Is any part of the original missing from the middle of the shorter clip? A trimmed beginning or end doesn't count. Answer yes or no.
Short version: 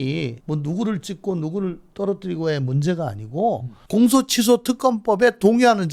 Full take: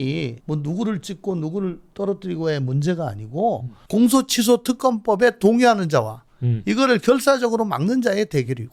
no